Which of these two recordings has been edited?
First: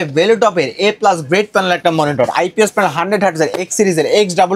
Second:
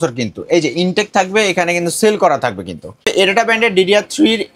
second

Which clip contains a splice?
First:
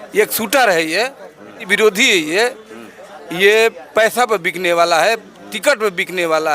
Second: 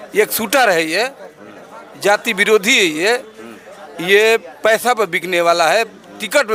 first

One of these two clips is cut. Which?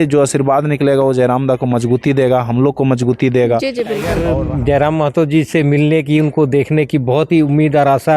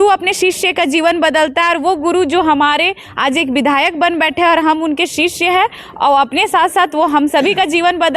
first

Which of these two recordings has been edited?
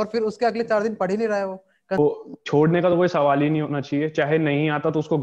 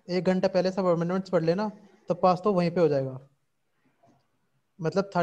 first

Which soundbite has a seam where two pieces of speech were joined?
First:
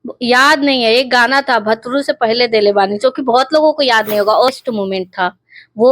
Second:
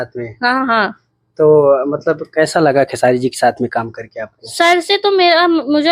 first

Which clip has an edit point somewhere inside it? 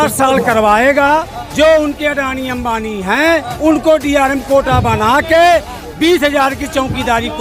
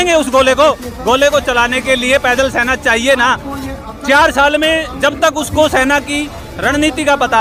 first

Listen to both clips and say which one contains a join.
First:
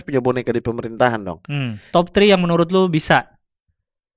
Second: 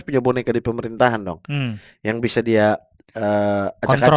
first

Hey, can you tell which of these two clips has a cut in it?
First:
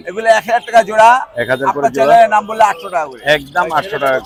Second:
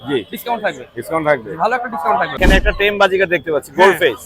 second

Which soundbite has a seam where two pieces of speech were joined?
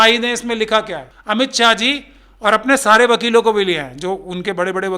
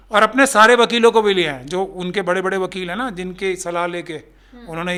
first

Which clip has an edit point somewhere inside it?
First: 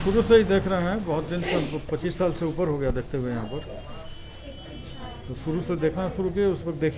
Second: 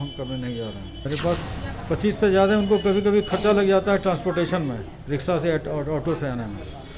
second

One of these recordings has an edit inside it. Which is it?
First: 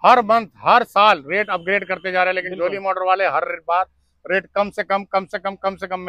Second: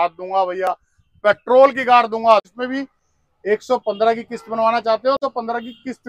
second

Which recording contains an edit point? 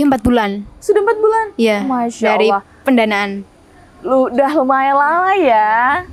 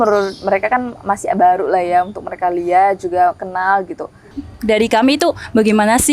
second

